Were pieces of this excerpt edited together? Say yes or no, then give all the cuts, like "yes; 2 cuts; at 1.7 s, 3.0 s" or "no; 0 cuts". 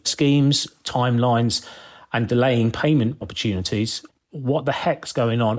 yes; 1 cut; at 4.1 s